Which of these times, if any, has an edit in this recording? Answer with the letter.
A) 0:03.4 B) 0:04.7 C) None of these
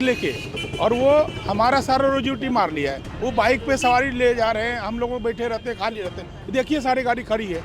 C